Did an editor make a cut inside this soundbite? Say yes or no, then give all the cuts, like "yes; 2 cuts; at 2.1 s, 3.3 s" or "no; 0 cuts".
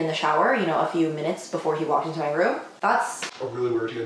no; 0 cuts